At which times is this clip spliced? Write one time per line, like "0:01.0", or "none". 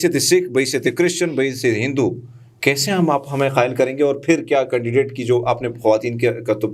none